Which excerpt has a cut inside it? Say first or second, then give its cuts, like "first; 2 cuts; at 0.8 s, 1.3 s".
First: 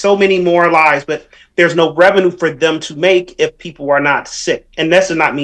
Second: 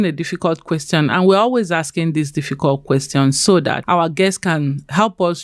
second; 1 cut; at 3.8 s